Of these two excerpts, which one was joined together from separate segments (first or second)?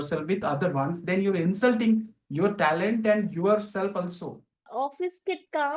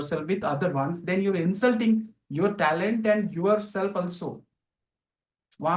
first